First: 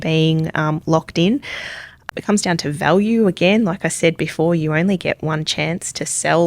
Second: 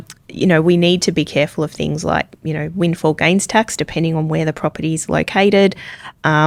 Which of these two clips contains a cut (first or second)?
first